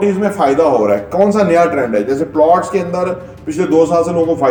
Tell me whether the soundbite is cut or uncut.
uncut